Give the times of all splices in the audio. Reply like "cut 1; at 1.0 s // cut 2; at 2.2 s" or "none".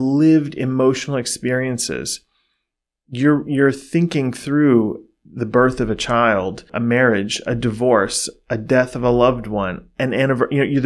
none